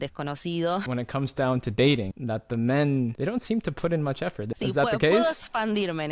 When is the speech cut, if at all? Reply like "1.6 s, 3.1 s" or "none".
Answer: 0.8 s, 2.1 s, 3.2 s, 4.5 s